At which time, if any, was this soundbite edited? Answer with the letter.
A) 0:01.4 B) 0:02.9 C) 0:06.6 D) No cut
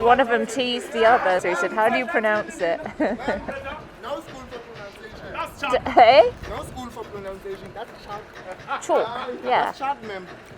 A